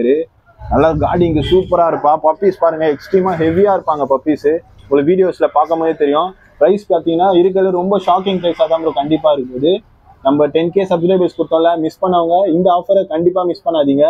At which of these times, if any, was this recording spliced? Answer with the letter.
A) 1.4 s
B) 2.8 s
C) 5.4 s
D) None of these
D